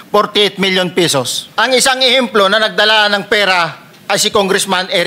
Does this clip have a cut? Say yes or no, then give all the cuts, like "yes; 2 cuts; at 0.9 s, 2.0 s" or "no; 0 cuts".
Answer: yes; 1 cut; at 1.4 s